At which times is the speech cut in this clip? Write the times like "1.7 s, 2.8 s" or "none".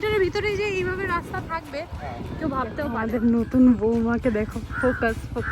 2.9 s

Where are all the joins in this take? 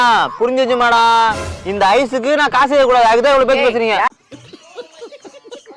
4.1 s

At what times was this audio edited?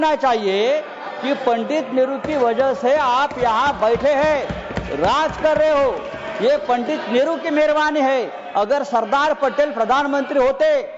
none

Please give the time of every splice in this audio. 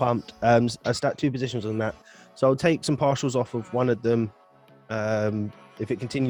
none

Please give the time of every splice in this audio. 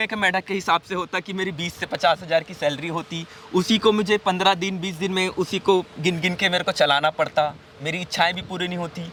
none

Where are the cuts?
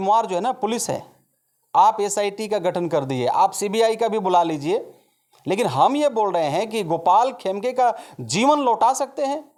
none

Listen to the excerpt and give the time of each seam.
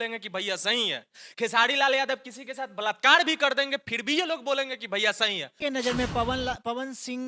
5.5 s

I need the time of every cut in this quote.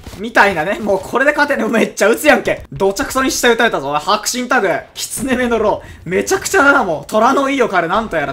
2.7 s

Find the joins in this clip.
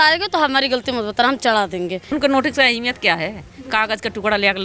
2.1 s

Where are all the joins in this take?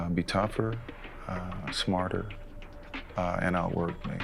none

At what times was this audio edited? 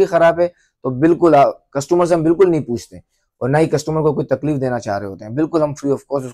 none

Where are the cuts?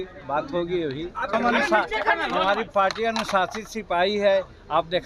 1.3 s

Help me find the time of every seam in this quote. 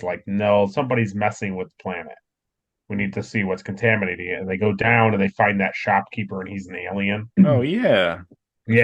7.3 s

